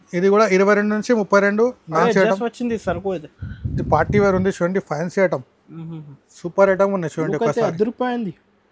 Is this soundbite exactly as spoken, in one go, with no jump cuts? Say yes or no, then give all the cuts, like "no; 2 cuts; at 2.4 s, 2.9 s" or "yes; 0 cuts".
no; 1 cut; at 1.9 s